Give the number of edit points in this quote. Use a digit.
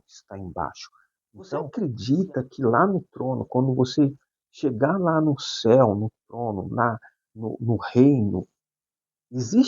1